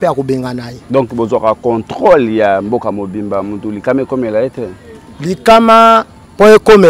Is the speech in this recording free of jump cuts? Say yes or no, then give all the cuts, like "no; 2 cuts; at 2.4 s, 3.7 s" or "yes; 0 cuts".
yes; 0 cuts